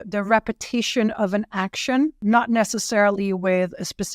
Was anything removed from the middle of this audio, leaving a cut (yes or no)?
yes